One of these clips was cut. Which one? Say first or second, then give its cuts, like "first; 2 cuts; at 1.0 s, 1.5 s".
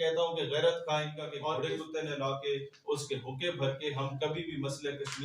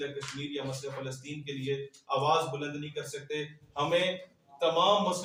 first; 1 cut; at 1.4 s